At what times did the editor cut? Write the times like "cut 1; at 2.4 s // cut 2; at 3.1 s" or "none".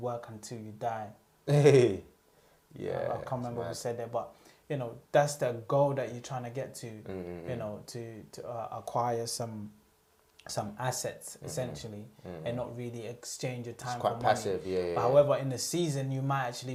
none